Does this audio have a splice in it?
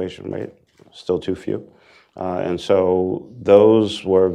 no; 0 cuts

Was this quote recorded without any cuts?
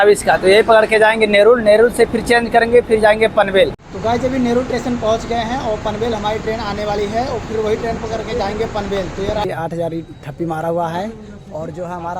no; 2 cuts; at 3.8 s, 9.5 s

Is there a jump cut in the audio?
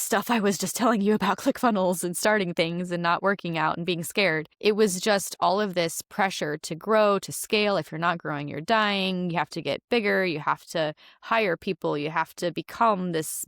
yes; 1 cut; at 4.5 s

